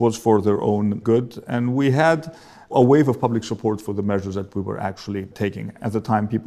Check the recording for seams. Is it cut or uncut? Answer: cut